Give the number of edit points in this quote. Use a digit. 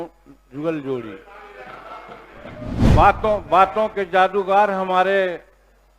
1